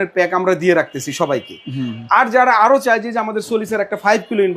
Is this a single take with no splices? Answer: yes; 0 cuts

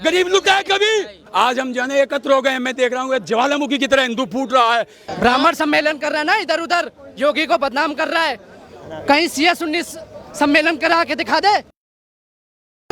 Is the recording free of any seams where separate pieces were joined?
no; 2 cuts; at 1.2 s, 5.0 s

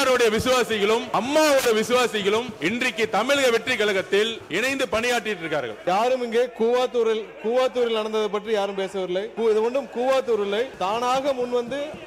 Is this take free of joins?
no; 6 cuts; at 1.1 s, 2.5 s, 4.4 s, 5.8 s, 9.3 s, 10.7 s

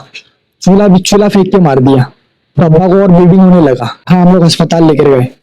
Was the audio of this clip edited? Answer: yes; 1 cut; at 4.1 s

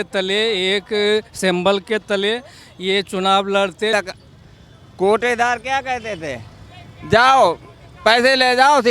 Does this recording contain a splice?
yes; 1 cut; at 3.9 s

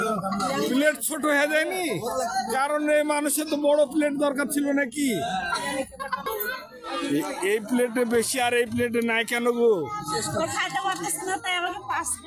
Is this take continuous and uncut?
no; 1 cut; at 6.2 s

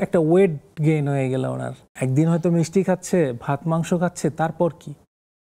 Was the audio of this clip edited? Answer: yes; 1 cut; at 1.8 s

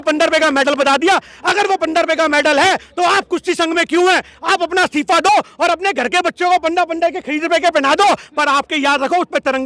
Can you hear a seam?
no; 0 cuts

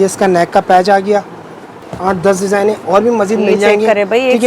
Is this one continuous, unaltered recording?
no; 1 cut; at 1.9 s

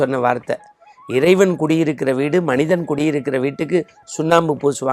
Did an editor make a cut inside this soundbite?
no; 0 cuts

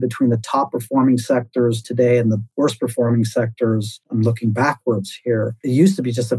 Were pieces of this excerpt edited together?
yes; 3 cuts; at 2.5 s, 4.0 s, 5.6 s

